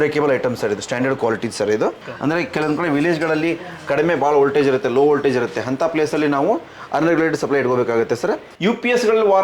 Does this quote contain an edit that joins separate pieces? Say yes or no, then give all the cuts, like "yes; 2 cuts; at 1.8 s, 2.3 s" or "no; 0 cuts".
yes; 2 cuts; at 2.0 s, 8.5 s